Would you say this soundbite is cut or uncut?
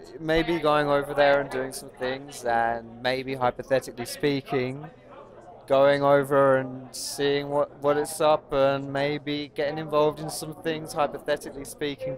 uncut